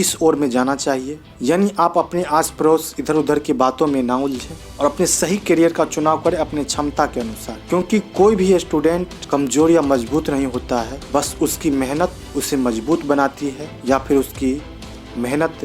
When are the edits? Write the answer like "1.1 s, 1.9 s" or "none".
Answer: 13.7 s